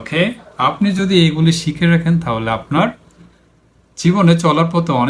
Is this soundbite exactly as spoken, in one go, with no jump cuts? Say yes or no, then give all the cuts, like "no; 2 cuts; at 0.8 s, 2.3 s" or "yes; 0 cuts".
yes; 0 cuts